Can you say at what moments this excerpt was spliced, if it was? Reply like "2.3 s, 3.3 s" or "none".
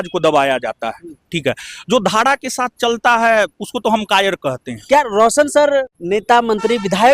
4.7 s, 6.0 s